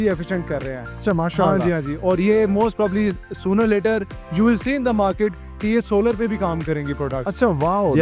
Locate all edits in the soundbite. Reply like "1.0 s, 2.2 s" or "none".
none